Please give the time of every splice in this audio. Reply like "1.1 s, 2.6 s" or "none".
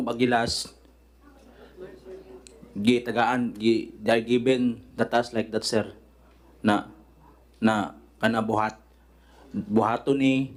none